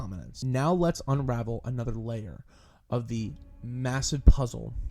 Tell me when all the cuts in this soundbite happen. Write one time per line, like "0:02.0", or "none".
none